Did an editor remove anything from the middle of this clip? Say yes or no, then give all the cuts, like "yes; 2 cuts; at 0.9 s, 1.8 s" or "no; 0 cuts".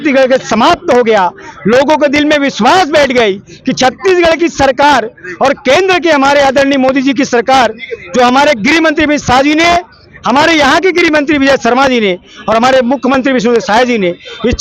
no; 0 cuts